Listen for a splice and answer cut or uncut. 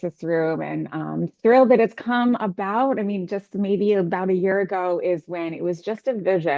uncut